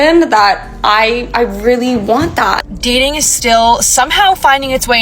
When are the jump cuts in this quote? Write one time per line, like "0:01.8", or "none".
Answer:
0:02.6